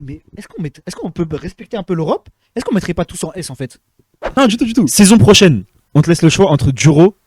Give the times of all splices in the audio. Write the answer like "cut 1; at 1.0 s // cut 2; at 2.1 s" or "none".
cut 1; at 4.3 s